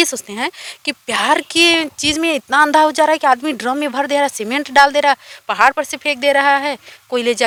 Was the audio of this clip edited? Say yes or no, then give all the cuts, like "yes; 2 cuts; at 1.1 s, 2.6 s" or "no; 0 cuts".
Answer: no; 0 cuts